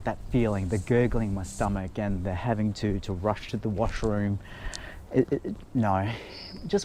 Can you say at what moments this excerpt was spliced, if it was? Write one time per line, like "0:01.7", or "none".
none